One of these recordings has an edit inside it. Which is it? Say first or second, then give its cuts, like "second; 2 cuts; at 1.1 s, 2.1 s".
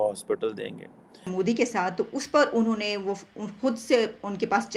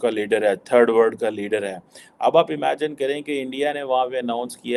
first; 1 cut; at 1.3 s